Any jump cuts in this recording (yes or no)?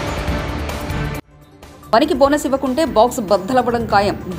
yes